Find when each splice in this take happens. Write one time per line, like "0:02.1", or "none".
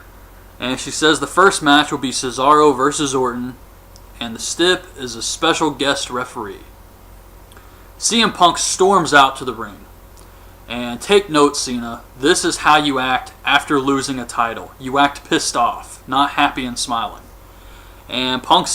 0:02.3